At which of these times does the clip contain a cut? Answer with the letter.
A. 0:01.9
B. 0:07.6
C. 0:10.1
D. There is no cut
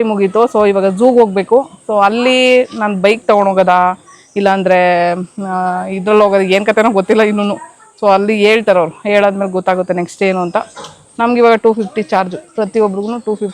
D